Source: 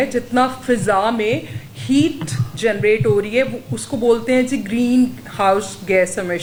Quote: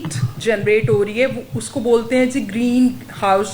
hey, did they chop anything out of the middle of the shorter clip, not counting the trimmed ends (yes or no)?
no